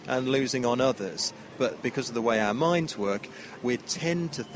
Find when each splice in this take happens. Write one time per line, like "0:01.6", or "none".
0:01.8
0:03.5